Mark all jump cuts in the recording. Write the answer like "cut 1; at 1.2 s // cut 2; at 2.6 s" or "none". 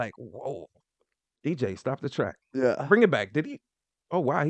none